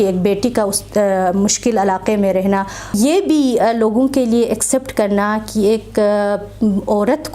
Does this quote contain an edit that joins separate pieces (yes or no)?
yes